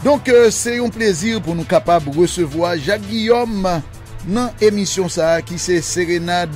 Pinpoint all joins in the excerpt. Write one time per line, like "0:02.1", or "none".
0:01.4